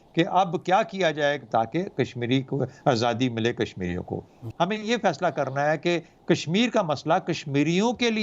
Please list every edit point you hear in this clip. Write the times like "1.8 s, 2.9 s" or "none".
1.5 s, 4.4 s